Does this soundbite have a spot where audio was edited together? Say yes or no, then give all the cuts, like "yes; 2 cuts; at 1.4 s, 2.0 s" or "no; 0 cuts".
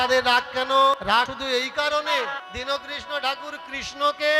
yes; 2 cuts; at 1.2 s, 2.4 s